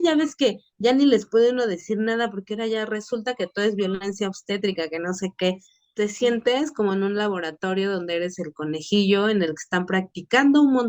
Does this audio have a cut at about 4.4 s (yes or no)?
no